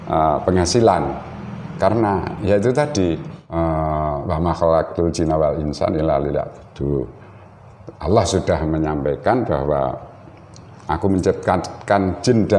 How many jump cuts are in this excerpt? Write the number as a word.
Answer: one